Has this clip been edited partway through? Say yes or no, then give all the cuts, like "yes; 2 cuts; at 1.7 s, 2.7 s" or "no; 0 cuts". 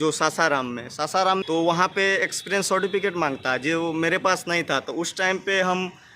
yes; 1 cut; at 1.4 s